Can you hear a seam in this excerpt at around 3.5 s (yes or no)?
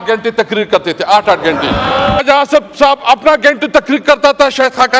no